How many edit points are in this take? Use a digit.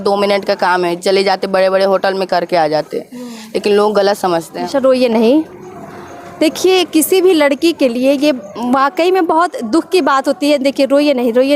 1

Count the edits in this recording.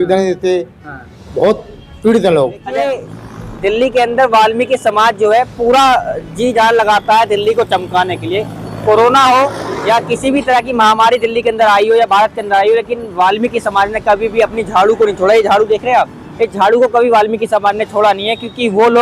1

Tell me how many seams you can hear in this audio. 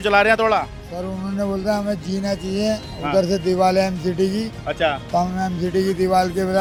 0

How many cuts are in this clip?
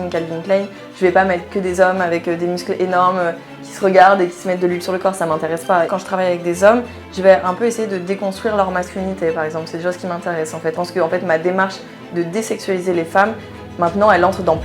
2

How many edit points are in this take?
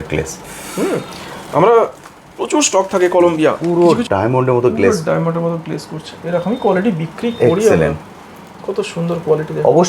1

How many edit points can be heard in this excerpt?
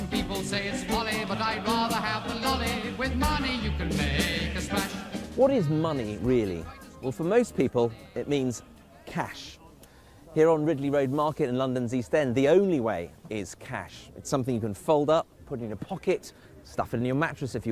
1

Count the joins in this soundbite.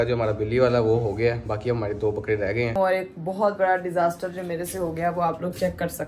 1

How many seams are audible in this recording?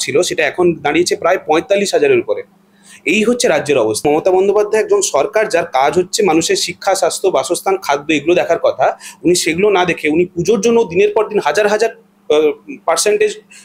1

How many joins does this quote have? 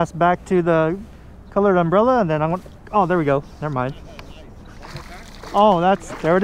0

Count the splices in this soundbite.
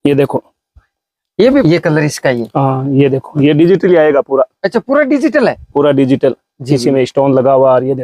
1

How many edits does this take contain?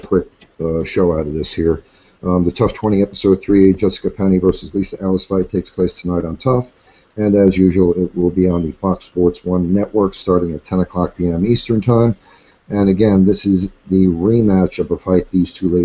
1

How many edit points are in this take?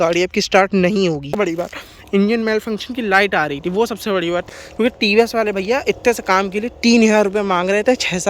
2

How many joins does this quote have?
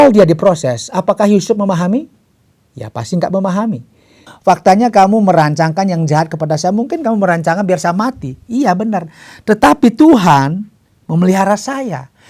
1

